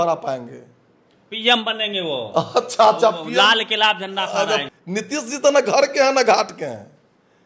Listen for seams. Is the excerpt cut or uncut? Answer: cut